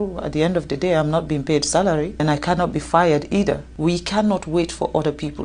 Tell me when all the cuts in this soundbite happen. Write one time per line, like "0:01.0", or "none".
0:02.2
0:03.7